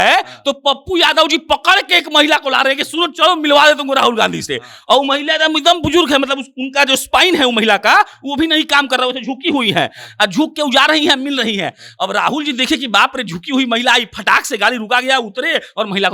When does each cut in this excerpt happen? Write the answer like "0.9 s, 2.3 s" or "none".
none